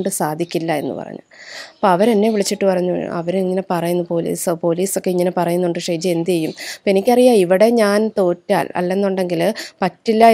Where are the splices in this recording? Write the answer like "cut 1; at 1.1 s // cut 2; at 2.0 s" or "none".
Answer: none